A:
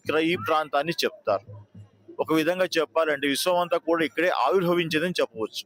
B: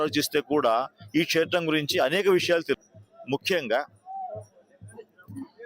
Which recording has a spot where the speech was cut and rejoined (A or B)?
B